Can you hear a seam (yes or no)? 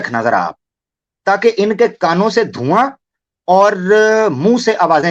no